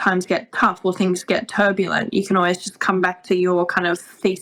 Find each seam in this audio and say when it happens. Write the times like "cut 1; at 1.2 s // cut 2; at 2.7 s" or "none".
none